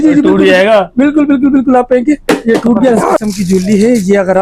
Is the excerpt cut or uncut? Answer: cut